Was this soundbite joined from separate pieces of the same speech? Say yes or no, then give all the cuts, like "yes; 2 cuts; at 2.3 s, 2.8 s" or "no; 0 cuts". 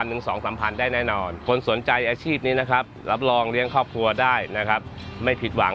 yes; 1 cut; at 1.4 s